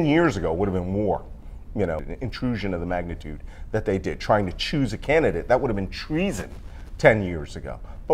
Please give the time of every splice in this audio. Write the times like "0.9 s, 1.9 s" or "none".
2.1 s